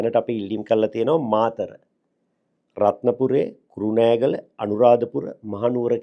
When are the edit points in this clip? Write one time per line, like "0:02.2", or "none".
none